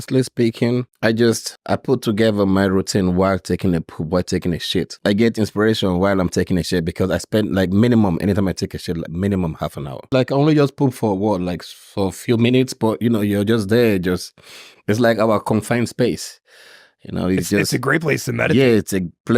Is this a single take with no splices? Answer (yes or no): no